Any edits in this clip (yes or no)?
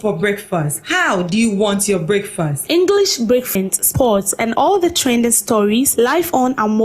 yes